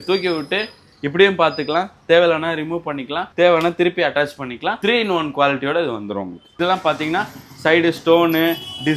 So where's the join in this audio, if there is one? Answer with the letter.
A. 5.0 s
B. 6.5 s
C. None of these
B